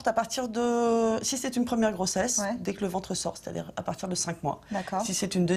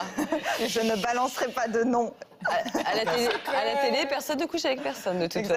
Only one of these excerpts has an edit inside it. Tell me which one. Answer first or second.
first